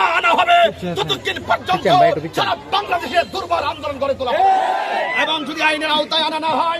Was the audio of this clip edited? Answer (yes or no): yes